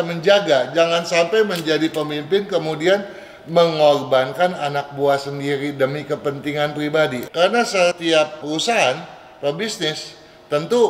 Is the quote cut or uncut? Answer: cut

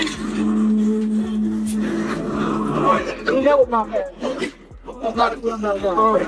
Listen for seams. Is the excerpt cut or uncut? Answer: uncut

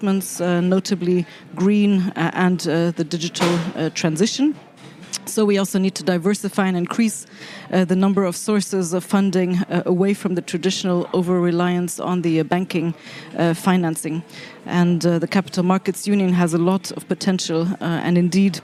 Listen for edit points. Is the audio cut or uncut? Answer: uncut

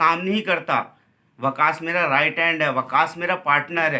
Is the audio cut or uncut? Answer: uncut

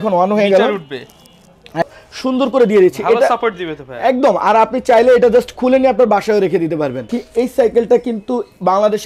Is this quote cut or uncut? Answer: cut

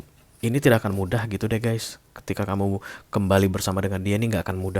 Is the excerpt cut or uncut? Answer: uncut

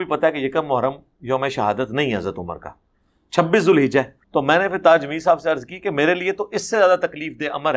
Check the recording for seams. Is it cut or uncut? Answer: cut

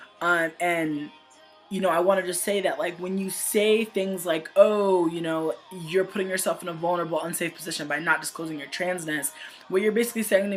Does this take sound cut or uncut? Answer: cut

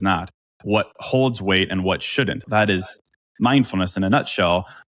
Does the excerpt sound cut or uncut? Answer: cut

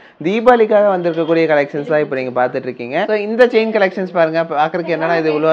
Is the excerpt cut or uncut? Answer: cut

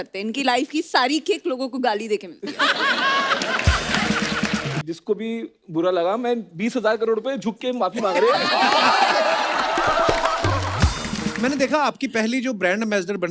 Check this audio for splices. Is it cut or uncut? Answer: cut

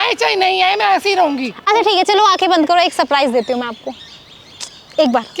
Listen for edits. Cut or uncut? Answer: uncut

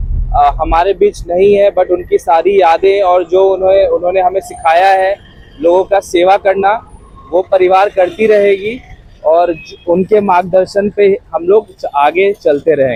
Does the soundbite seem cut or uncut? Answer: uncut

